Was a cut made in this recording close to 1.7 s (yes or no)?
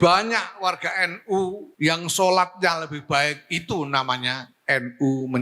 yes